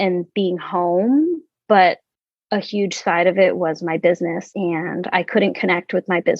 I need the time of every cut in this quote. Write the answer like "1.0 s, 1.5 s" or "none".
4.5 s